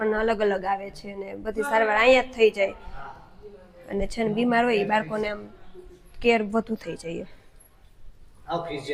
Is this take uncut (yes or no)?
yes